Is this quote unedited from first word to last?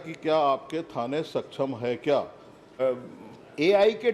no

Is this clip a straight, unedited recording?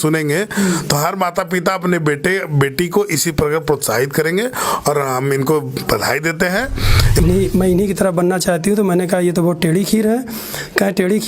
no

